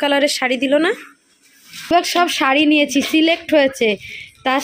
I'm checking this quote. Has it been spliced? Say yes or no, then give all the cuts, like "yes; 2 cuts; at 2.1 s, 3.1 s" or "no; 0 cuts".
yes; 1 cut; at 1.9 s